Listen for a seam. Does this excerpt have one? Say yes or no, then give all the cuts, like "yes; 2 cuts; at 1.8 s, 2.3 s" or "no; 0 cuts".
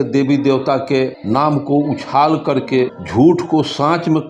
yes; 2 cuts; at 1.2 s, 3.0 s